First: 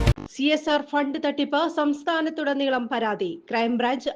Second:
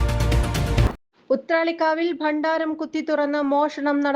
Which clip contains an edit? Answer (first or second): second